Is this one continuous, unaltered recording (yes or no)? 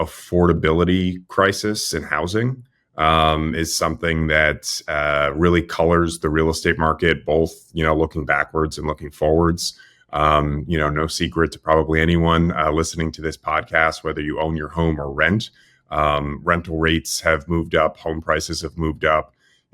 yes